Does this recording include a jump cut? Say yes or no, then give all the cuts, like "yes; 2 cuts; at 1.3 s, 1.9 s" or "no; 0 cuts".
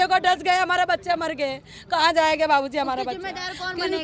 no; 0 cuts